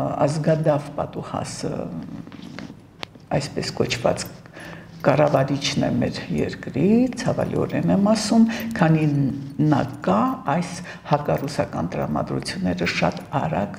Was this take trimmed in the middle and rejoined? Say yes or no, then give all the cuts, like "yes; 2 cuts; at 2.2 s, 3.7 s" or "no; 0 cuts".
no; 0 cuts